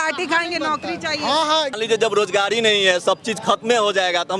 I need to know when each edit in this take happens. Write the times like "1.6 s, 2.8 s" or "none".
1.7 s